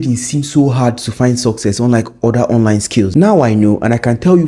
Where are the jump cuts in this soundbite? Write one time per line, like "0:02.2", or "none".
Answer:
0:03.1